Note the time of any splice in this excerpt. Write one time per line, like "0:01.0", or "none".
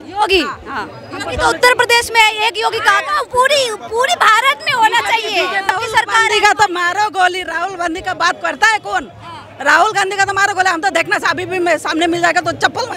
0:05.7